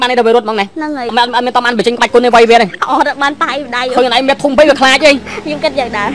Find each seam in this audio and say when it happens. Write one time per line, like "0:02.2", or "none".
0:01.0